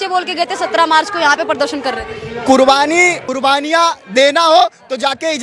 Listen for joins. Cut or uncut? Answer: uncut